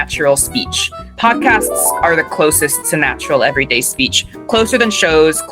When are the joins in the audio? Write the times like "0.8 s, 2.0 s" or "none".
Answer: 1.1 s